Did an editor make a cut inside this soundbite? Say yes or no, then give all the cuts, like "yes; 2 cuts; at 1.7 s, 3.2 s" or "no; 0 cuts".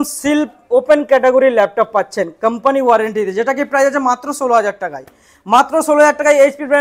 no; 0 cuts